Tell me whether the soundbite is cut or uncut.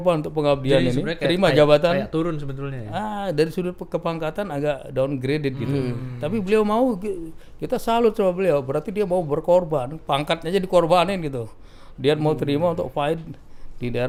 uncut